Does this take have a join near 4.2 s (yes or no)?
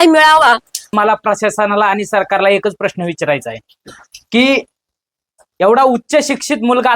no